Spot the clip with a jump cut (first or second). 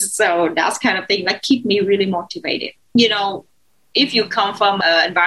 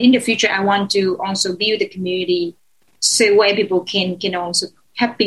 first